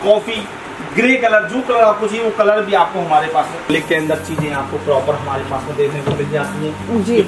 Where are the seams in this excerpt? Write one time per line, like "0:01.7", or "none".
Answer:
0:03.6

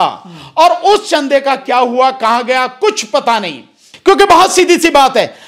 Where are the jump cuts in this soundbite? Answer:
0:03.9

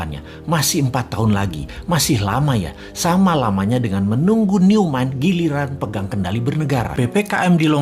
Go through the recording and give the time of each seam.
0:06.9

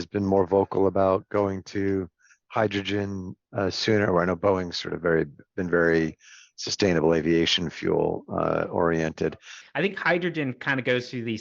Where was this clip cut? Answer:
0:09.5

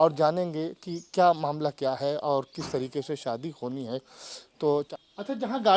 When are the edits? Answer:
0:04.9

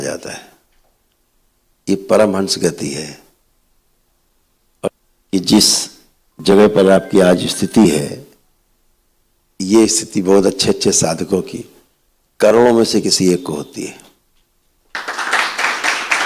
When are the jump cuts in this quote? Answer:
0:05.1

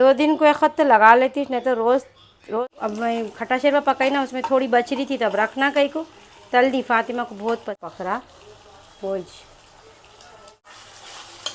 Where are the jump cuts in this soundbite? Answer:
0:02.6
0:07.8
0:10.7

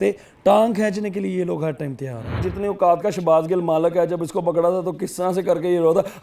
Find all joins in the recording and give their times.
0:02.5

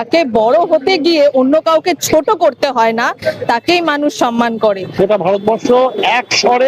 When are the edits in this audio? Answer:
0:04.9

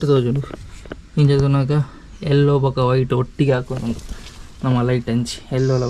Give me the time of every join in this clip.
none

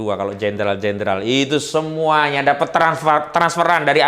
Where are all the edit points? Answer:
none

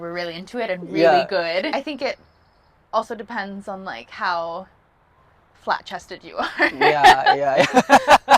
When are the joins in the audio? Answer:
0:01.7

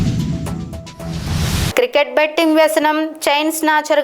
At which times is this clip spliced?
0:01.7

